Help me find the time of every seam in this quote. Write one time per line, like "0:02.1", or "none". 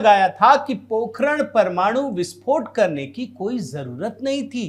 none